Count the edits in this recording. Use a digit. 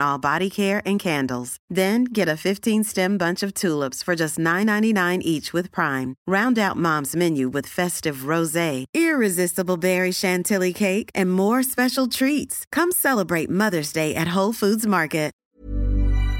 1